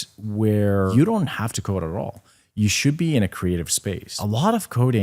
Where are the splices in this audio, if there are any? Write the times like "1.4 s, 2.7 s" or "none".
0.9 s, 4.1 s

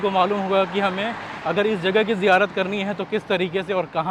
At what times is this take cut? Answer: none

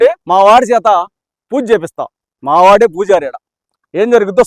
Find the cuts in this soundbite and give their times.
none

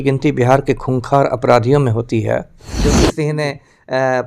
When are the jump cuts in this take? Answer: 2.7 s

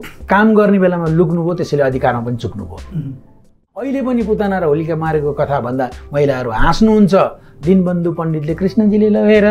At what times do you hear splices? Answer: 3.7 s

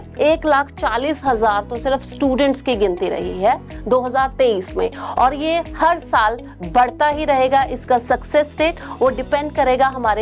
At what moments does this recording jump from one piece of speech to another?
none

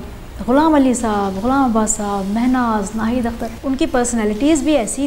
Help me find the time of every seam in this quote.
3.5 s

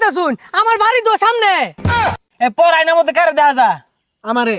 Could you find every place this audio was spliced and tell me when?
1.8 s

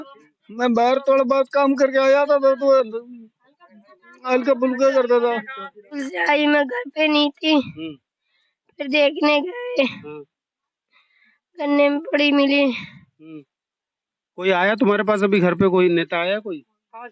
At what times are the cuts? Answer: 6.1 s

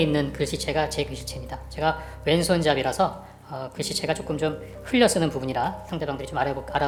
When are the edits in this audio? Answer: none

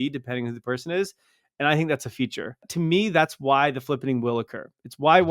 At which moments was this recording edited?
2.7 s

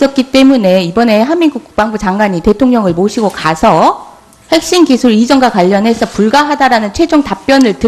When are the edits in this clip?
none

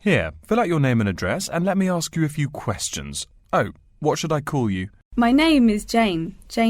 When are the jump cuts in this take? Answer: 5.0 s

